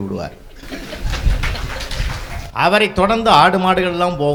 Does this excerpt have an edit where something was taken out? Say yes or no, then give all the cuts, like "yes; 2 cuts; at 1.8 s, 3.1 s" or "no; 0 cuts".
no; 0 cuts